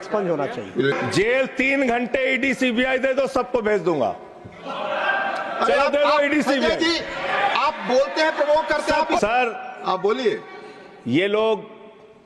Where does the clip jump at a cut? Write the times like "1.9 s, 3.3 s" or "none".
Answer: 0.9 s, 9.2 s